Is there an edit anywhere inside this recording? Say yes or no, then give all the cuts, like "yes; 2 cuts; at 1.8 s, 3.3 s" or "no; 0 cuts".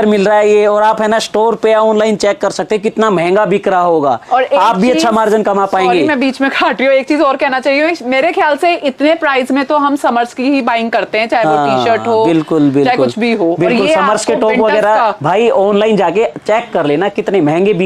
no; 0 cuts